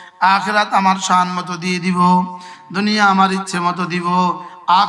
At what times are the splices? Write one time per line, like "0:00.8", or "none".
none

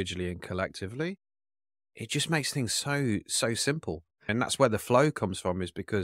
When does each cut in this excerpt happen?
0:04.3

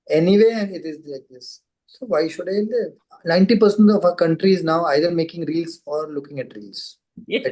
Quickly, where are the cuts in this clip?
0:03.1

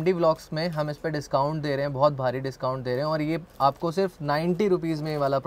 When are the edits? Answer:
none

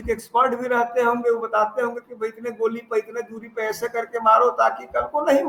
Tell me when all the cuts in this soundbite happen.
none

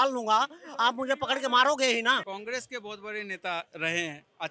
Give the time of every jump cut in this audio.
none

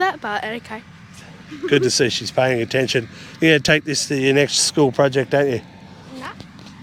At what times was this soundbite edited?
none

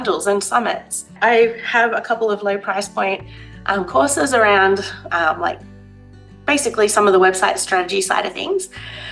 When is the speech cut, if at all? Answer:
none

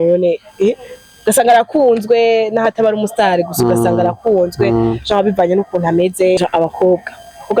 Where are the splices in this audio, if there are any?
0:06.4

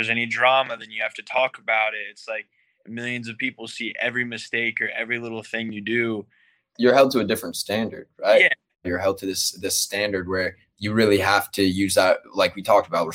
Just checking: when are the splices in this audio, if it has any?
0:06.7
0:08.9

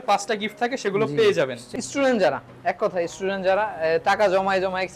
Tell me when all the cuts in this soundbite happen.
0:01.6

